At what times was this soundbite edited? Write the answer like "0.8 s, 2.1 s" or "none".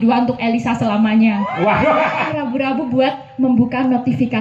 2.3 s